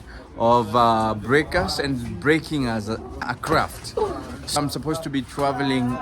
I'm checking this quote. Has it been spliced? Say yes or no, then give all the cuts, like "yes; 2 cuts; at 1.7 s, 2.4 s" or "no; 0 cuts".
yes; 2 cuts; at 3.2 s, 4.6 s